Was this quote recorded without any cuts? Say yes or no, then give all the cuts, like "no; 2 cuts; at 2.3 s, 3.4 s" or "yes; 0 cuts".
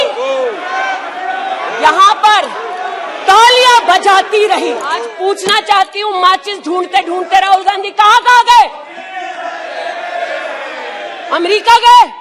no; 1 cut; at 5.0 s